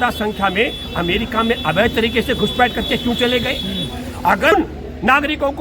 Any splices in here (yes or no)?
yes